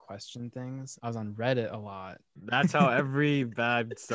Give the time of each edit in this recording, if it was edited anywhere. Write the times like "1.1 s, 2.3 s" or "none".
0.9 s, 2.5 s